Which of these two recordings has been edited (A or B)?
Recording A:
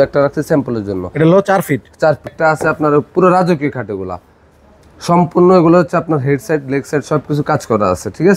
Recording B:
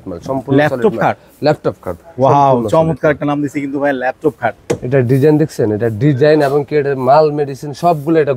A